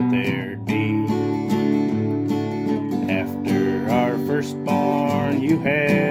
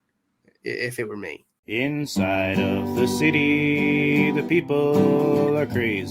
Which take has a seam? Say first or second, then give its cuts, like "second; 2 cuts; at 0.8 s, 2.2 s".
second; 1 cut; at 1.5 s